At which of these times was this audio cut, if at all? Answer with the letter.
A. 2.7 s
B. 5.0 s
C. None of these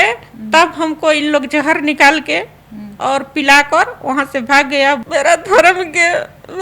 B